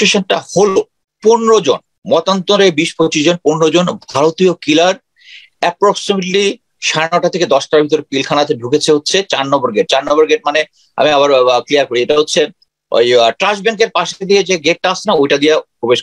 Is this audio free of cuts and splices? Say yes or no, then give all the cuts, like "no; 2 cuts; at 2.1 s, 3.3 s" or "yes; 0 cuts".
no; 2 cuts; at 1.0 s, 1.9 s